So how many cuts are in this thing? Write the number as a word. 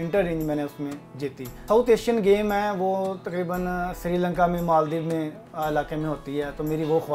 one